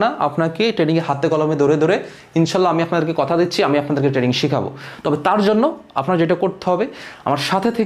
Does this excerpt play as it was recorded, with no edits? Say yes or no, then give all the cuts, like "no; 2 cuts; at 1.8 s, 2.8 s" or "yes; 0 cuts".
yes; 0 cuts